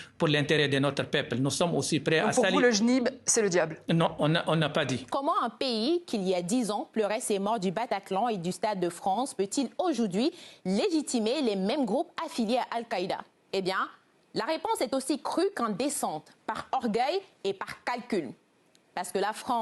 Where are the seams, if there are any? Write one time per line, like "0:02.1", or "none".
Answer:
0:05.0
0:13.3